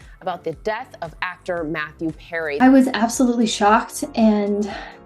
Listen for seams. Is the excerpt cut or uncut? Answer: cut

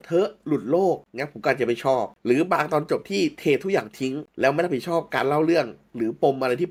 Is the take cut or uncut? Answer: uncut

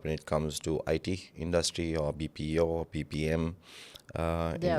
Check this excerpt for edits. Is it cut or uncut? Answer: uncut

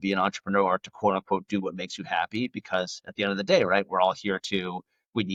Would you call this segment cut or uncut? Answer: uncut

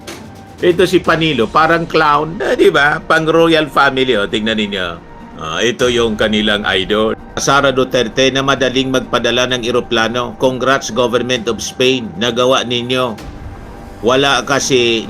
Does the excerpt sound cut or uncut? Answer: cut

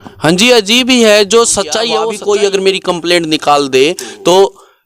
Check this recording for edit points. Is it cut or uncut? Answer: cut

